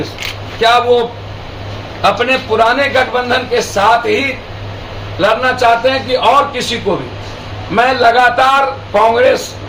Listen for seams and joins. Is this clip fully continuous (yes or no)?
yes